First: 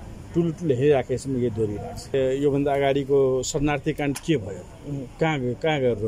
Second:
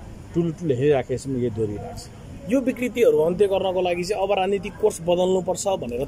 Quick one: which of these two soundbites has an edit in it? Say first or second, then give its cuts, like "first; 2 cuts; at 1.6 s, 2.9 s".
first; 1 cut; at 2.1 s